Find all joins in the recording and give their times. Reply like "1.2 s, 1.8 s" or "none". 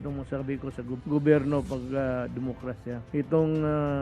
0.9 s, 3.0 s